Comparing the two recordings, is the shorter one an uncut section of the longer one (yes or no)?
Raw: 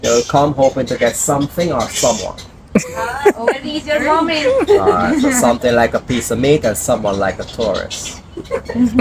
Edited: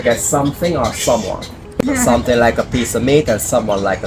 no